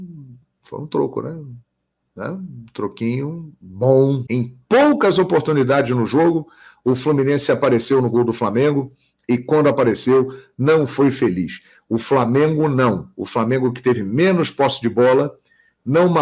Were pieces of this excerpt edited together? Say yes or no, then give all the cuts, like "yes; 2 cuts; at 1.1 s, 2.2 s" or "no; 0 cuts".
yes; 1 cut; at 4.2 s